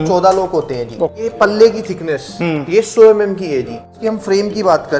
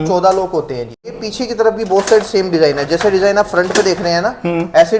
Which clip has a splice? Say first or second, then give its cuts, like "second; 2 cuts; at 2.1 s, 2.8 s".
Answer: first; 2 cuts; at 1.2 s, 3.9 s